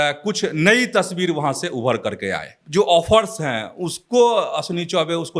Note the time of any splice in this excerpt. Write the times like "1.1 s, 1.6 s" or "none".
2.5 s